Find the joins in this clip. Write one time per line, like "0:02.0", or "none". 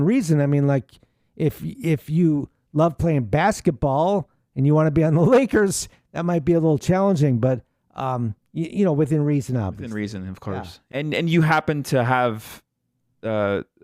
0:10.9